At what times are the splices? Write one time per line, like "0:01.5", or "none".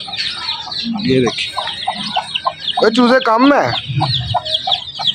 none